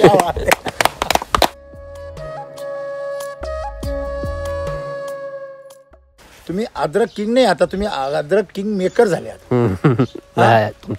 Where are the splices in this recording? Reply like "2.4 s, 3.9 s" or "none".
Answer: 1.6 s, 6.0 s